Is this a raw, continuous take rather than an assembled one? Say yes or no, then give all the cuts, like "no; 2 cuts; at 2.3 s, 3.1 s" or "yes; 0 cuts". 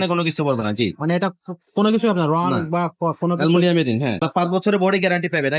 no; 1 cut; at 4.3 s